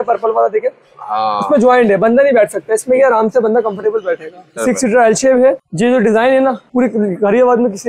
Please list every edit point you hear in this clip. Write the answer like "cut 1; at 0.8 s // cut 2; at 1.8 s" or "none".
cut 1; at 4.6 s // cut 2; at 5.7 s // cut 3; at 6.6 s